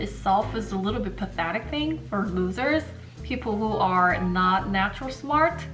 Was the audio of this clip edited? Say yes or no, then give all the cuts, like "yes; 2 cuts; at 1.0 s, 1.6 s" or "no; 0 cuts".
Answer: no; 0 cuts